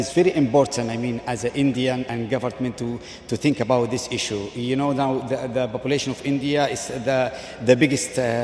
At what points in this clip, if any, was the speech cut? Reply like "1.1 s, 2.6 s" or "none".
none